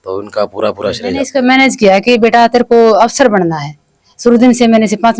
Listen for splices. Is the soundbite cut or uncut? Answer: cut